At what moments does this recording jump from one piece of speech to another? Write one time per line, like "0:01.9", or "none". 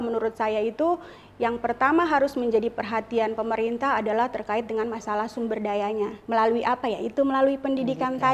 0:06.2